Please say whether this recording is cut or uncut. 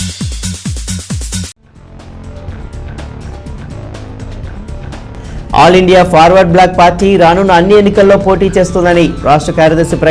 cut